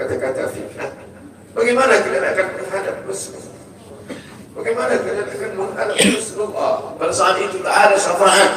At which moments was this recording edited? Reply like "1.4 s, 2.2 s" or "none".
6.9 s